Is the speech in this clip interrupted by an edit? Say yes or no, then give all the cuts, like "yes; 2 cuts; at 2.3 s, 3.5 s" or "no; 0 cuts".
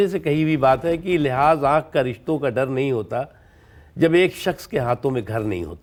no; 0 cuts